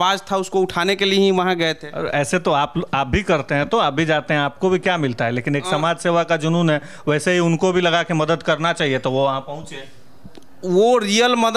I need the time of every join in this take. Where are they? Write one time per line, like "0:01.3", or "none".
none